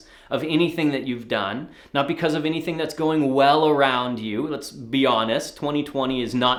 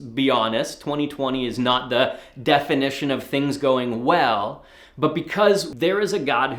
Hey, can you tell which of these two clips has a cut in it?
second; 1 cut; at 5.7 s

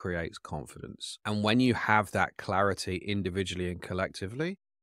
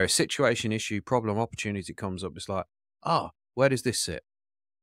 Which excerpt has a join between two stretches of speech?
first; 1 cut; at 1.1 s

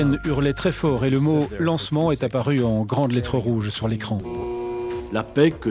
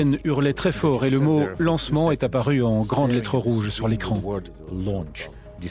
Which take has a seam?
first; 1 cut; at 4.7 s

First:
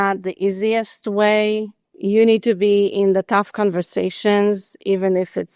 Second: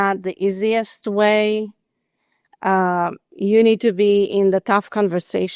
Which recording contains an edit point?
first; 1 cut; at 1.9 s

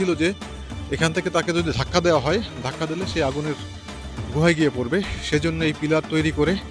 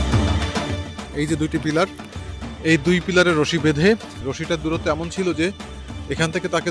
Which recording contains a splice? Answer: second; 2 cuts; at 1.0 s, 4.1 s

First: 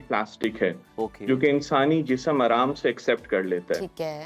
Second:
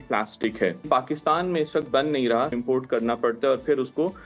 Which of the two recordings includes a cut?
second; 2 cuts; at 0.8 s, 2.5 s

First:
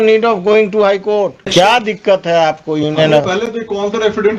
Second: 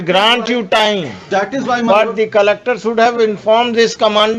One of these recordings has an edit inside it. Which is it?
first; 1 cut; at 1.5 s

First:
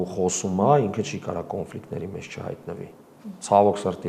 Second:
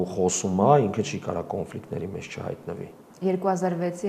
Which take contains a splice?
second; 1 cut; at 3.0 s

